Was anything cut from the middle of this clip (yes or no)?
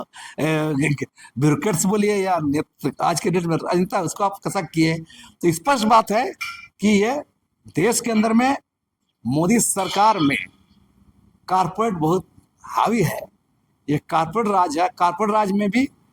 no